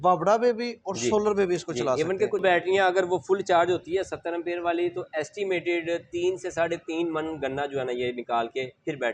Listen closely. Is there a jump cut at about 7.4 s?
no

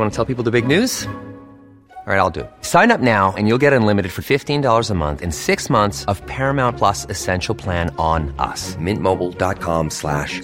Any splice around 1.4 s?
no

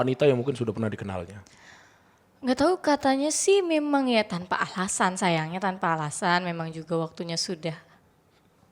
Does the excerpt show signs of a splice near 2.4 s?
no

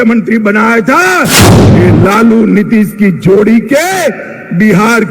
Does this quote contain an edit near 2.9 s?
no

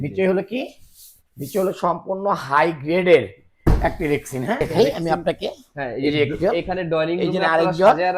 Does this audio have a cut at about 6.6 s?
no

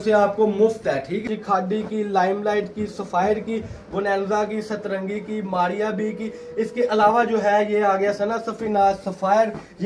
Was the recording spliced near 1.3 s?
yes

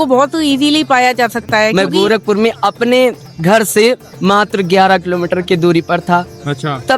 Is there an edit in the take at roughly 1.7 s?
yes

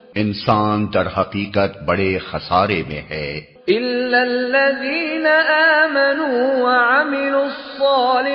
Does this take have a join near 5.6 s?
no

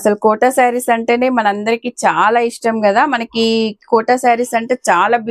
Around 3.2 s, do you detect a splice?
no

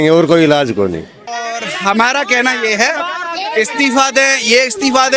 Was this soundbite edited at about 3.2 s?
no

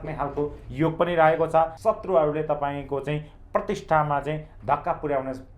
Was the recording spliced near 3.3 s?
no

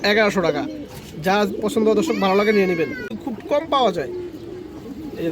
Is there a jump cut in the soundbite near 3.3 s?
yes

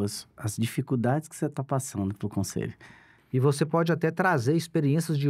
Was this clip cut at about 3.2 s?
yes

